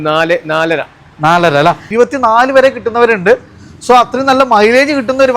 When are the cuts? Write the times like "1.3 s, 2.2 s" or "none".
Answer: 1.8 s

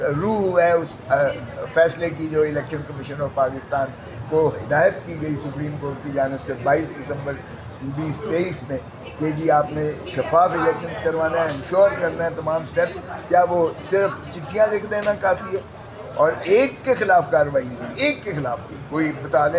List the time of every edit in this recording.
none

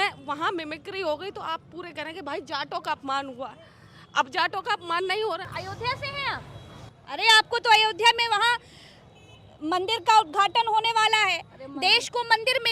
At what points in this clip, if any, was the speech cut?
5.5 s

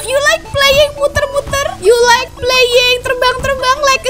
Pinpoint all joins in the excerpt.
1.7 s

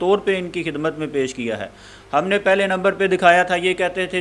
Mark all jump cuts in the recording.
none

